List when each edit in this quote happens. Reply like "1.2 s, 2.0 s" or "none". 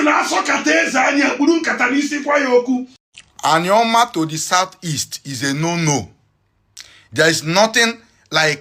3.0 s